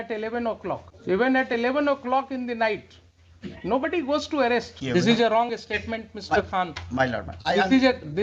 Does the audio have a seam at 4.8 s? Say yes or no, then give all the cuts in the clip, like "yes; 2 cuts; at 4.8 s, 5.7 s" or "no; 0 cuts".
yes; 2 cuts; at 0.9 s, 4.8 s